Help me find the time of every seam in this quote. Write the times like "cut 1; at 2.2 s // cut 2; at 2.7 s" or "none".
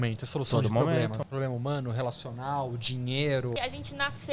cut 1; at 1.3 s // cut 2; at 3.5 s